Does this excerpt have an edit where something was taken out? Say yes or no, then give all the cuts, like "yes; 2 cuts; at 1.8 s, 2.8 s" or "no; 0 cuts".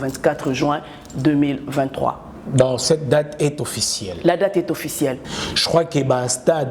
yes; 1 cut; at 5.3 s